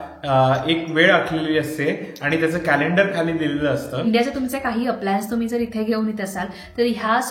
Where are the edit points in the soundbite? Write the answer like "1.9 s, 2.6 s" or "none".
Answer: 3.9 s